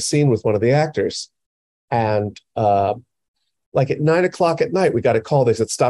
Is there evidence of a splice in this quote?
no; 0 cuts

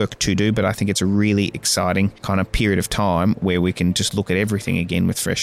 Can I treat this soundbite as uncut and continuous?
no; 1 cut; at 2.2 s

